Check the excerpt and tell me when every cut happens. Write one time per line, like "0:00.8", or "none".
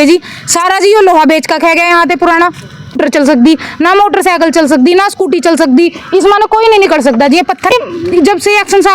0:03.0
0:07.7